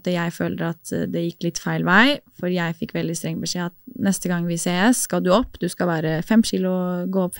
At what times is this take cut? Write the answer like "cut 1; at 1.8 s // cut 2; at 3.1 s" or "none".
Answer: none